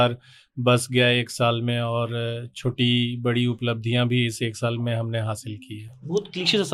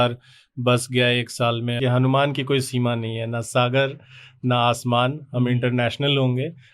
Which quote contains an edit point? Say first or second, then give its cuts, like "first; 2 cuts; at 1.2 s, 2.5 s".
second; 1 cut; at 1.8 s